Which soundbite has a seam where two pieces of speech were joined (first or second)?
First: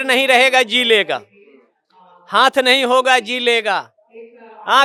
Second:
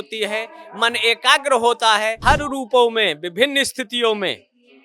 second